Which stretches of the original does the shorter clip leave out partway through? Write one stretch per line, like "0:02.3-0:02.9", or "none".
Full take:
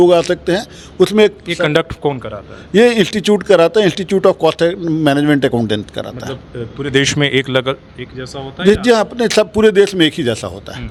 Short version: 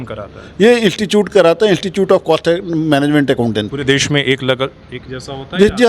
0:05.9-0:06.8